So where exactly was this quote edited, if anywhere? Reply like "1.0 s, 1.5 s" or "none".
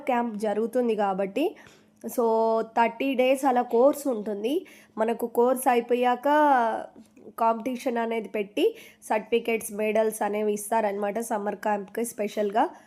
none